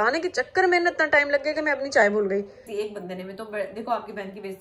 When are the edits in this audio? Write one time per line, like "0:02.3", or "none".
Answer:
0:02.6